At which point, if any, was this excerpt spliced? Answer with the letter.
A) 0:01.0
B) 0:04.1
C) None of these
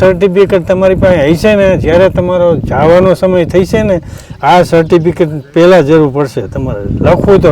C